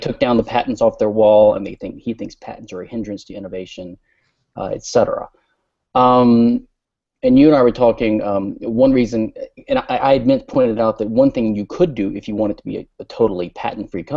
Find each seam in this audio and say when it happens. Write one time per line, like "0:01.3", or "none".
0:04.8